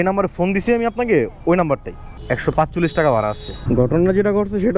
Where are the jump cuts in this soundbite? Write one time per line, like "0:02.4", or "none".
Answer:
none